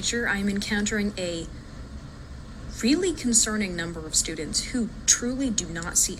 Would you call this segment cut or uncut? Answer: uncut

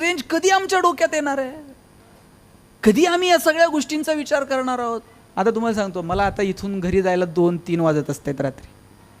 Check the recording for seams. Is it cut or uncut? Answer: cut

